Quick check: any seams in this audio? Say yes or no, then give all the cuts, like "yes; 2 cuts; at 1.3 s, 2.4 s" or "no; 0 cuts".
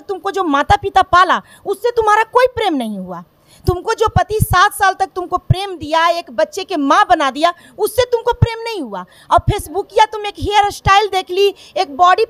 no; 0 cuts